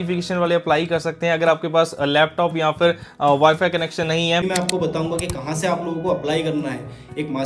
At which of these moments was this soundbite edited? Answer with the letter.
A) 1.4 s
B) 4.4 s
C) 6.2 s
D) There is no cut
B